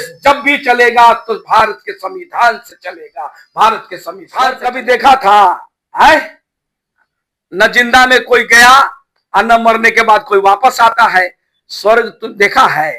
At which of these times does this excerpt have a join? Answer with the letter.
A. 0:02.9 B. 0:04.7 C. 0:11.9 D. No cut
B